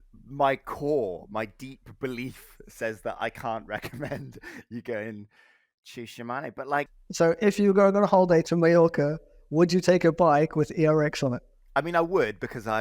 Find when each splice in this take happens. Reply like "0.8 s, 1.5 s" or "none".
7.0 s, 8.5 s, 11.5 s